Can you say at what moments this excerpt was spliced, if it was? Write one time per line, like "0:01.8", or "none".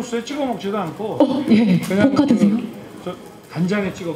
none